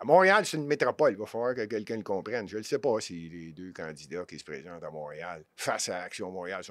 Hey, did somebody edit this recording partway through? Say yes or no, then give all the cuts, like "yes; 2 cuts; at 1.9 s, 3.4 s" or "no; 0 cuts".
no; 0 cuts